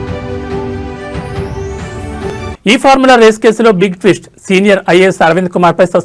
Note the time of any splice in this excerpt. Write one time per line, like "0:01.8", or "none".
0:02.2